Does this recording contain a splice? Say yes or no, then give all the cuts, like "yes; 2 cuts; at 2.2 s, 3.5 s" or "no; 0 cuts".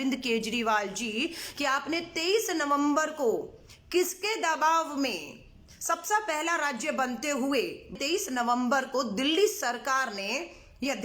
yes; 1 cut; at 7.9 s